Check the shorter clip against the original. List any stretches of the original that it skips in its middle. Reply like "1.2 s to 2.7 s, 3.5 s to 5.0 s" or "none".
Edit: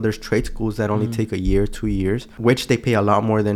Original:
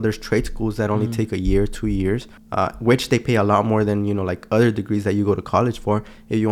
2.3 s to 2.7 s